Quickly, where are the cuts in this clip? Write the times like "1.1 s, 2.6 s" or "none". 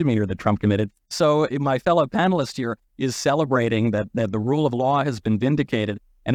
none